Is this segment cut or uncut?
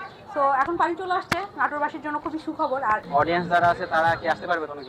cut